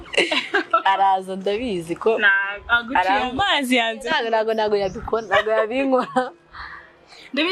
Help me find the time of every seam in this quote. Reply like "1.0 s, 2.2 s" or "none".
none